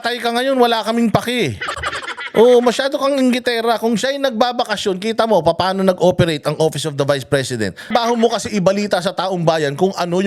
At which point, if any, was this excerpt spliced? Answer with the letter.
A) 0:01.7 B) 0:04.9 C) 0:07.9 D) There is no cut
C